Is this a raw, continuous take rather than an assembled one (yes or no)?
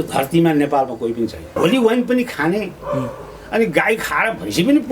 no